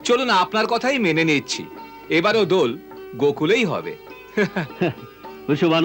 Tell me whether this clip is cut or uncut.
uncut